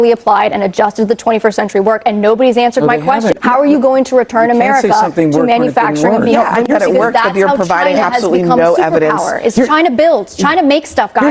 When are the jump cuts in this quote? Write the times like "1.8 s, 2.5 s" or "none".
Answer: 3.4 s, 6.7 s